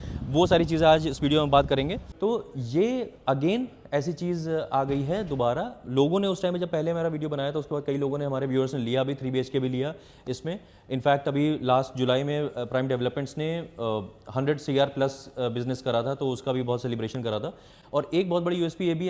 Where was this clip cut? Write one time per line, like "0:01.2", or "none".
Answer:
0:02.0
0:17.8